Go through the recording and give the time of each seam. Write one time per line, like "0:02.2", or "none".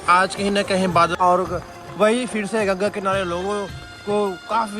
0:01.2